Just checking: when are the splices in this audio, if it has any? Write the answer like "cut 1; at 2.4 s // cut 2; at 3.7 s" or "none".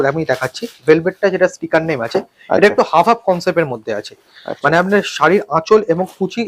none